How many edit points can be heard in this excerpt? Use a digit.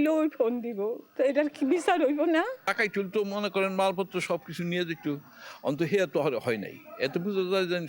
2